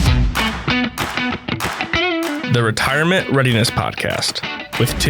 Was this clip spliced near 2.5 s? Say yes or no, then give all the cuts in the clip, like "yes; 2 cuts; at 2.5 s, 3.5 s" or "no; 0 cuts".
yes; 1 cut; at 2.5 s